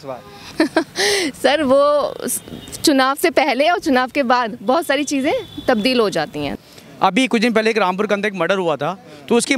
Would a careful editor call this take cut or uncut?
cut